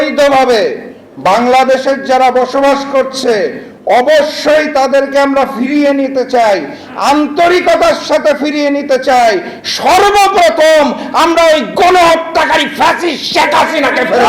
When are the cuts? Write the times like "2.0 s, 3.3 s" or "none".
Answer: none

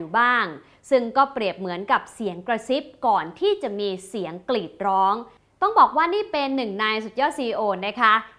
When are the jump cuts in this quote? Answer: 5.4 s

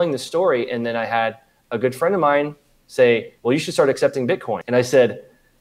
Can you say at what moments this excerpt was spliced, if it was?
3.3 s, 4.6 s

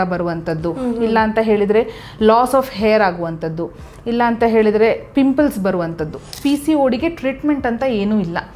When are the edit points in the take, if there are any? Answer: 6.3 s

